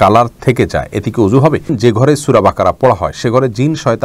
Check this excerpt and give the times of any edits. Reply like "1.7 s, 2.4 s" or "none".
1.7 s

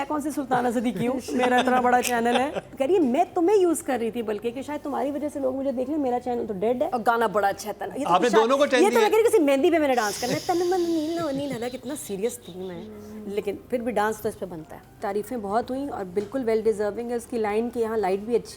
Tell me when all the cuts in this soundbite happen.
2.7 s, 6.9 s, 14.9 s

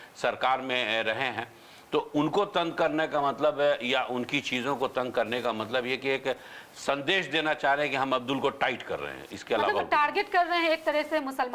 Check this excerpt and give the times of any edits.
none

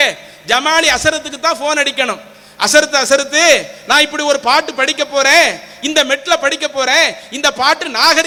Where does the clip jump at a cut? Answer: none

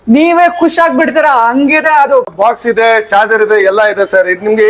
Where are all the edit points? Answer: 2.3 s

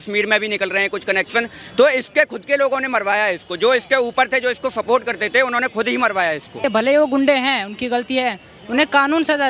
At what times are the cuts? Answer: 6.6 s

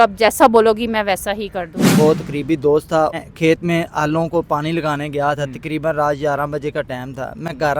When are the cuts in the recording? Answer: 1.8 s, 3.2 s

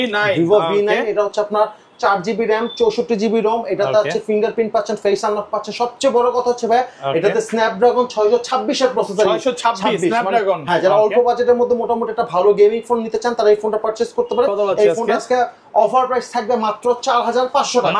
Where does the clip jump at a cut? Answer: none

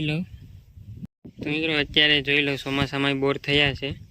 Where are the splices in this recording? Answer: 1.2 s

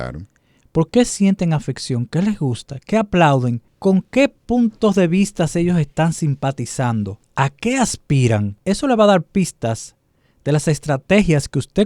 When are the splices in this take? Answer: 3.7 s, 7.2 s, 8.5 s

